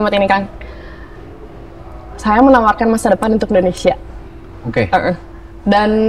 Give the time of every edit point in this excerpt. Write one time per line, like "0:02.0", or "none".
none